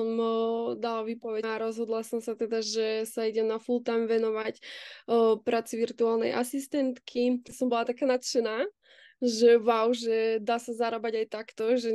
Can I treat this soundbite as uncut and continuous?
no; 2 cuts; at 1.5 s, 7.5 s

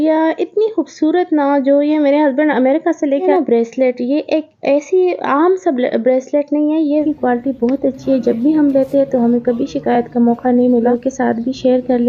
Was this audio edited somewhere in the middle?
yes; 3 cuts; at 3.3 s, 7.0 s, 10.9 s

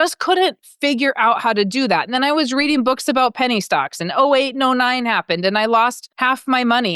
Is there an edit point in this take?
yes; 1 cut; at 6.1 s

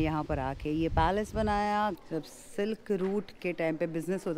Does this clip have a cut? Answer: yes; 1 cut; at 2.0 s

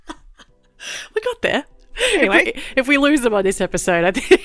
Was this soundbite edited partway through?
yes; 1 cut; at 1.8 s

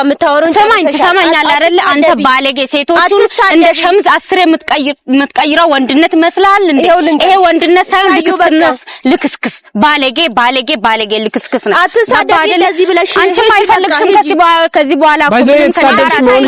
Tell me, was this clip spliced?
no; 0 cuts

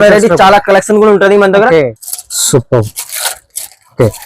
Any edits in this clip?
yes; 1 cut; at 2.0 s

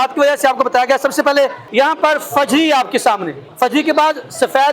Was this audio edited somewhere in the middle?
yes; 2 cuts; at 1.6 s, 3.4 s

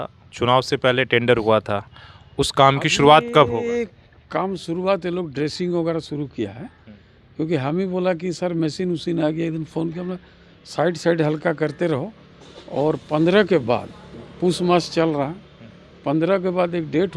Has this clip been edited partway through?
no; 0 cuts

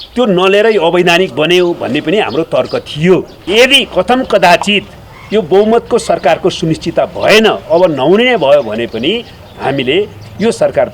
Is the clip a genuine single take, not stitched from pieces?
no; 1 cut; at 3.4 s

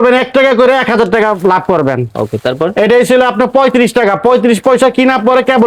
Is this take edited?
no; 0 cuts

